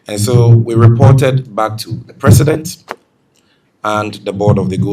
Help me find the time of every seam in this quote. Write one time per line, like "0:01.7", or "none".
none